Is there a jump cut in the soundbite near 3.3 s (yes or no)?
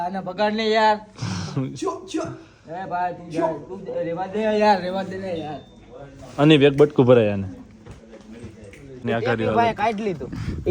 no